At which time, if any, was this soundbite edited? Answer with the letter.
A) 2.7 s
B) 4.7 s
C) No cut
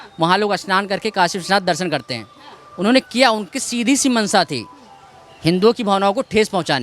C